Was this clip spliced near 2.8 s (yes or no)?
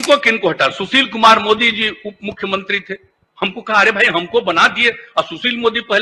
no